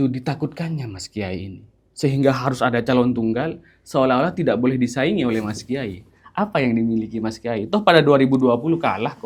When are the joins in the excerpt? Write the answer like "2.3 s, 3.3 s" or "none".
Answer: none